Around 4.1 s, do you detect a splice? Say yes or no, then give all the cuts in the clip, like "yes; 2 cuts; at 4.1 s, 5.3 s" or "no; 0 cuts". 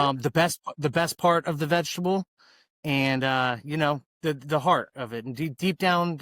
yes; 1 cut; at 4.1 s